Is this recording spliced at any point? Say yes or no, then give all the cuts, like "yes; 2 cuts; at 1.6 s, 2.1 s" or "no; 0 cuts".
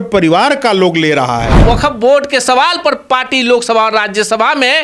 yes; 1 cut; at 1.6 s